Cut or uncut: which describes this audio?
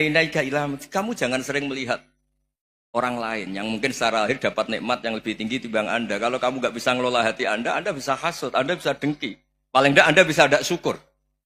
uncut